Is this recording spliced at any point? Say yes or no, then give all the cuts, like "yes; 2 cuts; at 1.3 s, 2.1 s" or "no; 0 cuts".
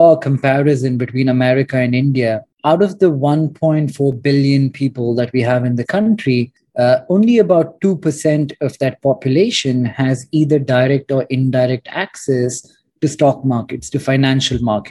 no; 0 cuts